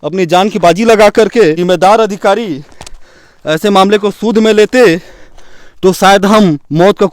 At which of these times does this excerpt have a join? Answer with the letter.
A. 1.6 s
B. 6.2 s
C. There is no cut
A